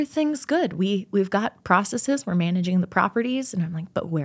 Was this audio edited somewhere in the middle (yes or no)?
no